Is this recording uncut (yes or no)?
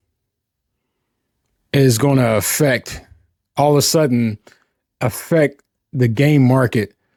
yes